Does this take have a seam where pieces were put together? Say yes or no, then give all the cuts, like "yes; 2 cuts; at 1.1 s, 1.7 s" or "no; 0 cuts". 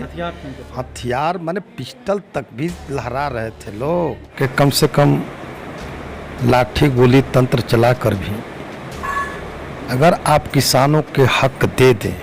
yes; 1 cut; at 4.2 s